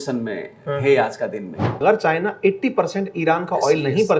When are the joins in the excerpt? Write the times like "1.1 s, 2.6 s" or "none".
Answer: 1.8 s